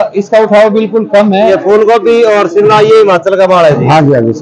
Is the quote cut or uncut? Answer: cut